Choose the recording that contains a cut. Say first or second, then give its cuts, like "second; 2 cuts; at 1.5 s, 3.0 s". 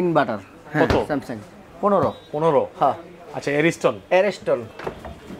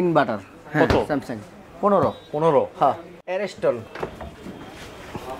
second; 1 cut; at 3.4 s